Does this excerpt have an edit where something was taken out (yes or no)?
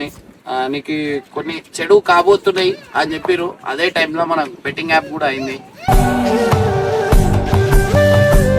no